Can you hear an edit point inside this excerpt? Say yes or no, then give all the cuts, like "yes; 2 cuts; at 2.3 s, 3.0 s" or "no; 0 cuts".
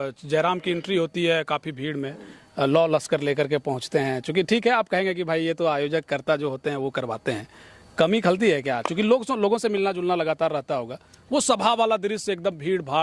no; 0 cuts